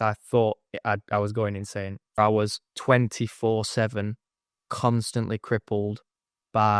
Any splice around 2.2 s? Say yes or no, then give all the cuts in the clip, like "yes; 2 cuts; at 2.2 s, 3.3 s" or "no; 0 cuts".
yes; 1 cut; at 2.2 s